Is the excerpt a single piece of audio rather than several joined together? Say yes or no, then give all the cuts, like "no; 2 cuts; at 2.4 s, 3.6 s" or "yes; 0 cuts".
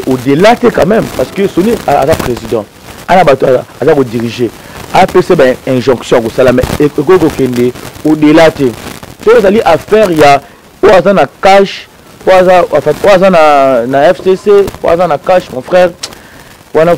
yes; 0 cuts